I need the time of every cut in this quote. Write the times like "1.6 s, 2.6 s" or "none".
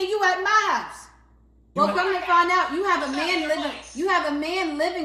1.6 s